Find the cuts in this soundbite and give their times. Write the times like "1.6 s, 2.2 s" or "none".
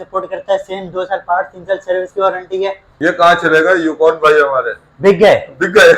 2.9 s